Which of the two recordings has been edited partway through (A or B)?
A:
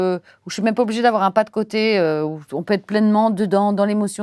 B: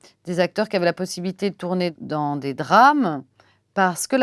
B